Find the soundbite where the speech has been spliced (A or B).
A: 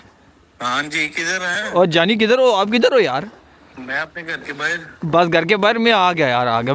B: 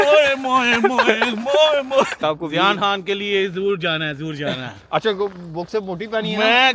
B